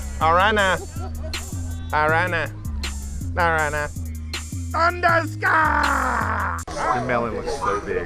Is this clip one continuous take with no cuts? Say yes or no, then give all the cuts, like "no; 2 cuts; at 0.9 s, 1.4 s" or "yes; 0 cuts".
no; 1 cut; at 6.6 s